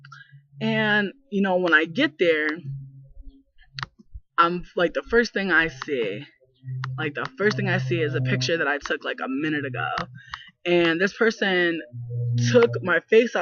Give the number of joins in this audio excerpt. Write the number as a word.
one